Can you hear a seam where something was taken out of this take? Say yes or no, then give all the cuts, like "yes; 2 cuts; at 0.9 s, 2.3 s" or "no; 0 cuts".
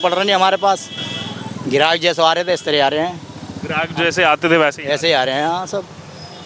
no; 0 cuts